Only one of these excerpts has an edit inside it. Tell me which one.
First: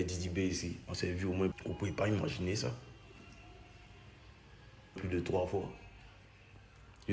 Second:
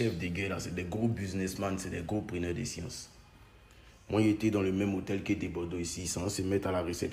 first; 2 cuts; at 1.6 s, 4.9 s

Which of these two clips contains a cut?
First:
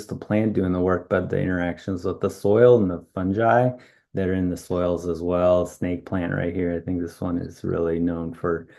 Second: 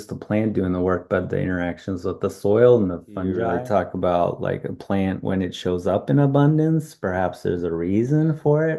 second; 1 cut; at 3.4 s

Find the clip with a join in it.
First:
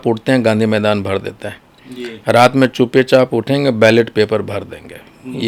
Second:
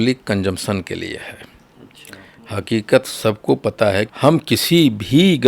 second; 1 cut; at 4.1 s

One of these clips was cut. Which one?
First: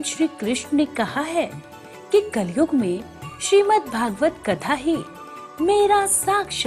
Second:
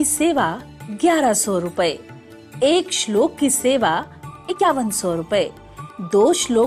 second; 1 cut; at 4.6 s

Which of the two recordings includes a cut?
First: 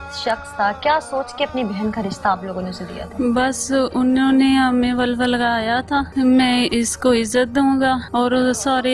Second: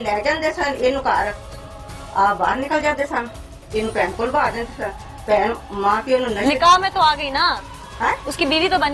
first; 2 cuts; at 6.1 s, 8.1 s

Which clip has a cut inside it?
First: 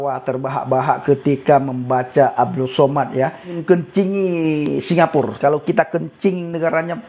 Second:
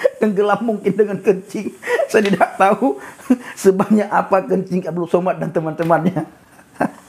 first; 2 cuts; at 3.5 s, 5.3 s

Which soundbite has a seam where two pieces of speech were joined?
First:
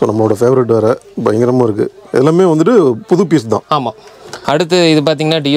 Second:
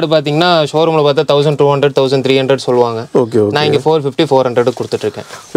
first; 1 cut; at 4.4 s

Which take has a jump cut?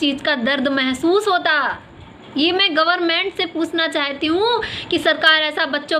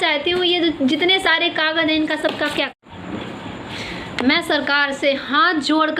second; 1 cut; at 2.7 s

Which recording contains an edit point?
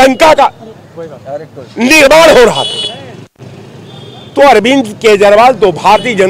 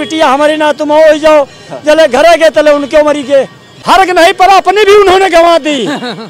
second; 1 cut; at 3.7 s

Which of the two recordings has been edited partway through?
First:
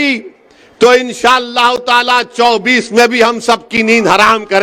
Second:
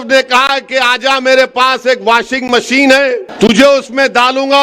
second; 1 cut; at 3.3 s

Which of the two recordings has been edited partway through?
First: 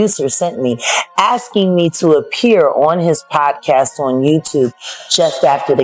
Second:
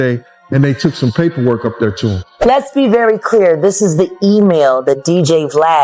second; 1 cut; at 2.3 s

